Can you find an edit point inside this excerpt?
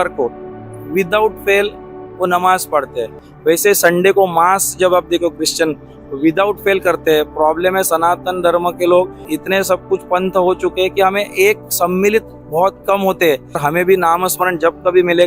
yes; 3 cuts; at 3.2 s, 9.2 s, 13.6 s

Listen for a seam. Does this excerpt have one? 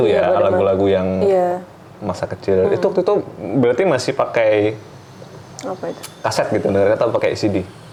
no; 0 cuts

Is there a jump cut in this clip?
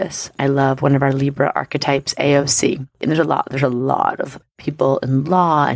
yes; 1 cut; at 2.9 s

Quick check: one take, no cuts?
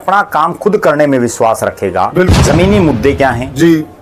no; 1 cut; at 2.3 s

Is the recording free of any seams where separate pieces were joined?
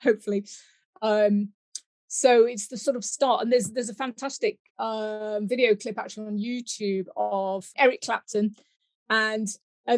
no; 1 cut; at 7.7 s

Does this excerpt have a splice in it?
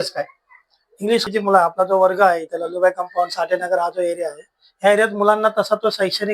yes; 1 cut; at 1.3 s

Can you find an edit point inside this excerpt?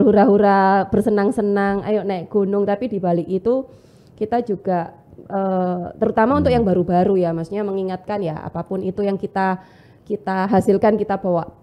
no; 0 cuts

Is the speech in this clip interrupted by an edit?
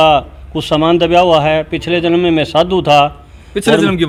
no; 0 cuts

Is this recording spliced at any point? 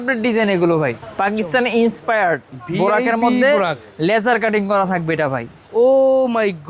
yes; 2 cuts; at 1.0 s, 2.6 s

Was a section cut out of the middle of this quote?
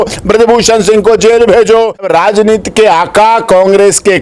yes; 1 cut; at 2.1 s

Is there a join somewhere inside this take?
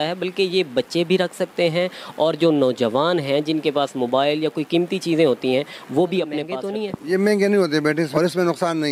yes; 2 cuts; at 6.6 s, 8.1 s

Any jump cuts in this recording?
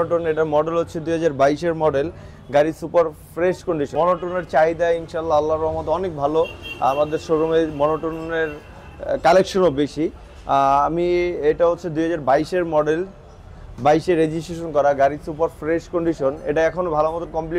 no; 0 cuts

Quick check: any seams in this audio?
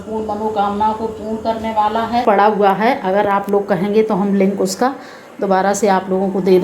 yes; 1 cut; at 2.2 s

